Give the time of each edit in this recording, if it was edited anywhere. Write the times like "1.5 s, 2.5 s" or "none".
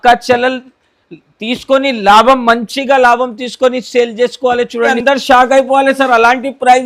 5.0 s